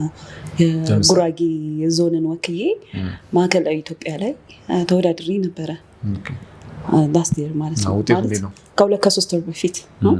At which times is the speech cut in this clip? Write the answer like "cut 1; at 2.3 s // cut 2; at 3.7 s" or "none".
none

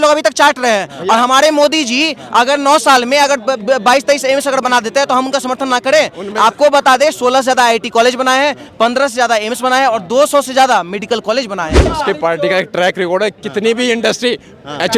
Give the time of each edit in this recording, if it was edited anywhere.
cut 1; at 11.9 s

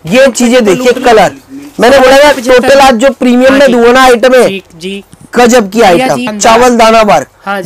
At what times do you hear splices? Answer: cut 1; at 6.3 s

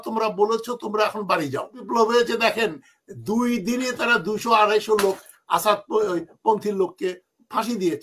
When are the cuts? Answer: cut 1; at 1.8 s

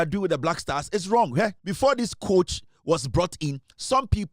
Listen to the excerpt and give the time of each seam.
cut 1; at 1.6 s

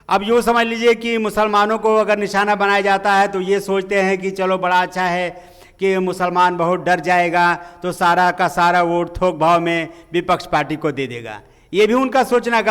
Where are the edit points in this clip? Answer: none

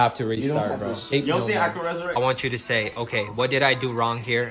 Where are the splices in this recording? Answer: cut 1; at 1.1 s // cut 2; at 2.2 s

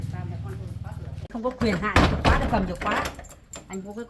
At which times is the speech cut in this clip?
cut 1; at 1.2 s

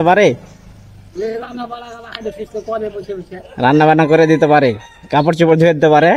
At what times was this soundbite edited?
none

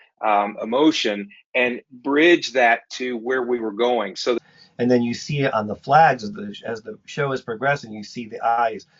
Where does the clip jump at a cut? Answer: cut 1; at 4.4 s

